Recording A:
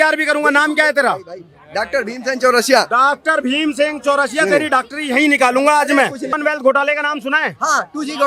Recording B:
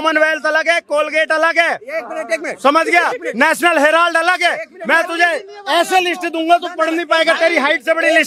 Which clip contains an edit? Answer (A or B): A